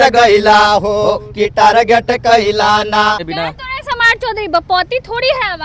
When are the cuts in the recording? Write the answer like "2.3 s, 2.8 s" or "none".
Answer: 3.3 s